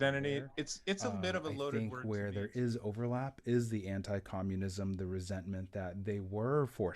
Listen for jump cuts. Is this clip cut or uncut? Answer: cut